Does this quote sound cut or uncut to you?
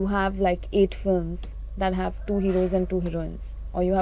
uncut